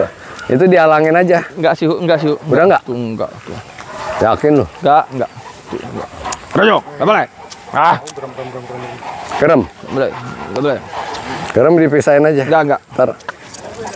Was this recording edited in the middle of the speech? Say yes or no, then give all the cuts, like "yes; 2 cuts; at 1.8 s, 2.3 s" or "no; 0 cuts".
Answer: no; 0 cuts